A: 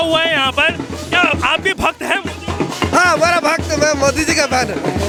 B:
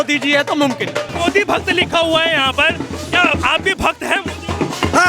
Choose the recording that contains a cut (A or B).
B